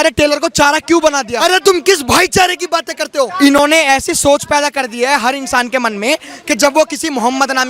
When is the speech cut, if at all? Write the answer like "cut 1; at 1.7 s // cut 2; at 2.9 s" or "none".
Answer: cut 1; at 1.4 s // cut 2; at 3.2 s